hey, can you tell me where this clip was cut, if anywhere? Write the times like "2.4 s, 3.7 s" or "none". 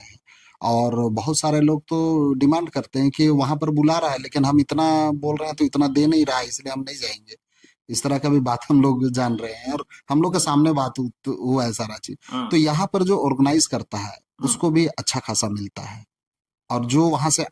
none